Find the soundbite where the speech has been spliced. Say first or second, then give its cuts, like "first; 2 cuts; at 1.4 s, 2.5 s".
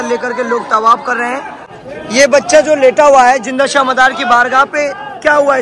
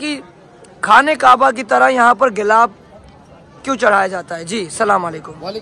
first; 1 cut; at 2.1 s